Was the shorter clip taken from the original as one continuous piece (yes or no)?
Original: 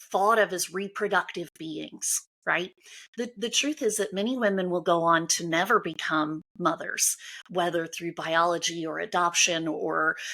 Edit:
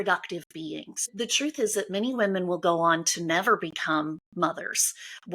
no